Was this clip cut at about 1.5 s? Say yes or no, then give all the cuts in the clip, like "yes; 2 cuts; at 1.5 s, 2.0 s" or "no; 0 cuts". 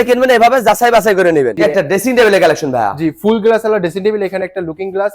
yes; 1 cut; at 1.5 s